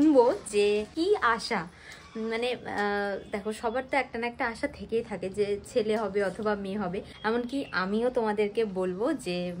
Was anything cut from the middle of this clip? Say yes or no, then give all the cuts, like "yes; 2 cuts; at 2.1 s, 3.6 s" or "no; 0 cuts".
yes; 2 cuts; at 0.9 s, 7.1 s